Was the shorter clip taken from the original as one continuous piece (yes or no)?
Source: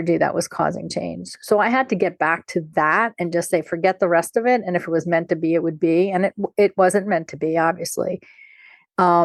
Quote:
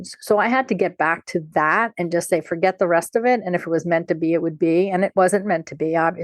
no